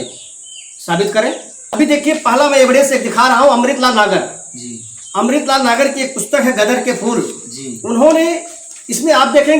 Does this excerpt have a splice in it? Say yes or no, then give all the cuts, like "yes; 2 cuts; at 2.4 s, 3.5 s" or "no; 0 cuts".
yes; 1 cut; at 1.8 s